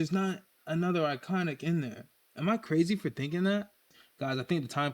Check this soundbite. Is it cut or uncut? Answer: cut